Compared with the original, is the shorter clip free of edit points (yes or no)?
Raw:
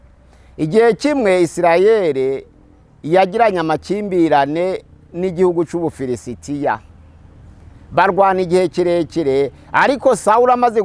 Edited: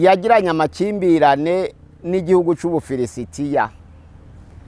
yes